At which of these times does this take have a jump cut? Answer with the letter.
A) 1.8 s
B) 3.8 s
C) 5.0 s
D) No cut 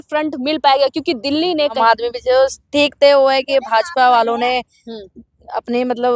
A